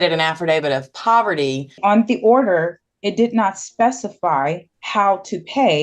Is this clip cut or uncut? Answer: cut